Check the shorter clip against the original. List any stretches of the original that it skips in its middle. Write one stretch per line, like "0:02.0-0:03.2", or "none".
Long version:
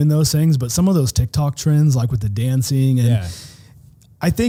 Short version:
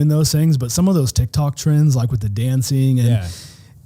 none